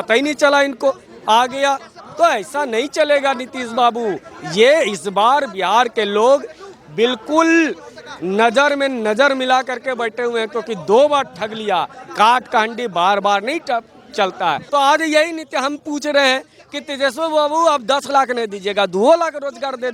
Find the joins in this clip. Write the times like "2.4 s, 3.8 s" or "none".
14.6 s